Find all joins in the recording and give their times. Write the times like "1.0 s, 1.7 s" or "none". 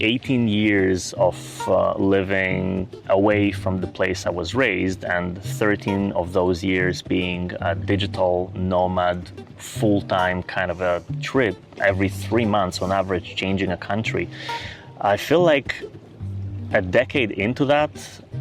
none